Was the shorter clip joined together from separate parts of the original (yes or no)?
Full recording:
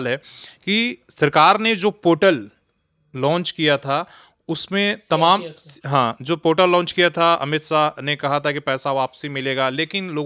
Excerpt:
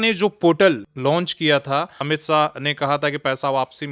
yes